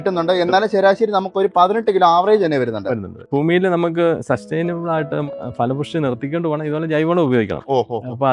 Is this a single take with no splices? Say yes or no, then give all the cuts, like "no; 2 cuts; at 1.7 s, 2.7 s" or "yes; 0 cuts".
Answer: no; 2 cuts; at 3.2 s, 5.3 s